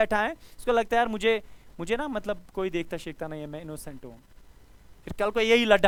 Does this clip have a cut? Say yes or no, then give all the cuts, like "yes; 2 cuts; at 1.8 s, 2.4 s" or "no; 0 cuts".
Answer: no; 0 cuts